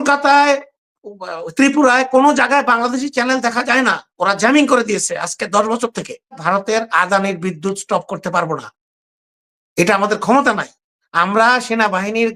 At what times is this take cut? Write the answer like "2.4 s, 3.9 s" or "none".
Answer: 6.4 s